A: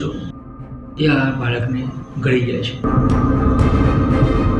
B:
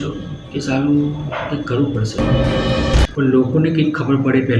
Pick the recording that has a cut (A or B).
B